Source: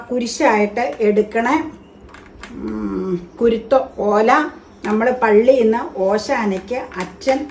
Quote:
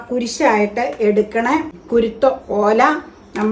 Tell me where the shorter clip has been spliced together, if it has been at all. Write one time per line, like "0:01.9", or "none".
0:01.8